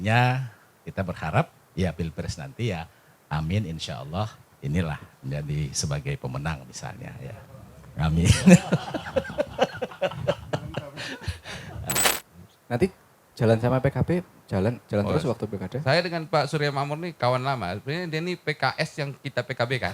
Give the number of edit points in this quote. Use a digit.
1